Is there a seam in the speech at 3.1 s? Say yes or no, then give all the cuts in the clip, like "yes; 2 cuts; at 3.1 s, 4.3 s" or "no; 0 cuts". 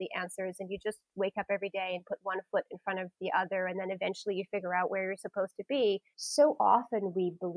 no; 1 cut; at 6.2 s